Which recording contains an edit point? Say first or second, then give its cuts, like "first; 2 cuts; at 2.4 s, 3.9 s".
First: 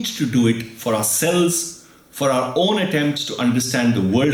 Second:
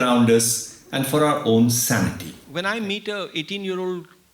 second; 1 cut; at 2.3 s